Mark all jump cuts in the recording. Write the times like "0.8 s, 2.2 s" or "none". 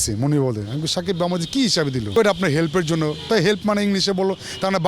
2.1 s

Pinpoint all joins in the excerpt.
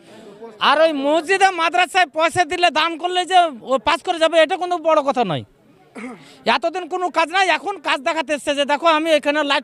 none

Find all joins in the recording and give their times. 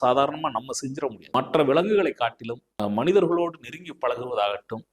1.2 s, 2.7 s

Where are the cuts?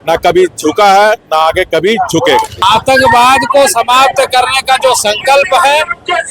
2.5 s

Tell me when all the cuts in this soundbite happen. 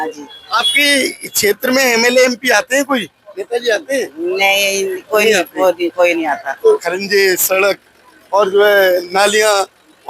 6.8 s

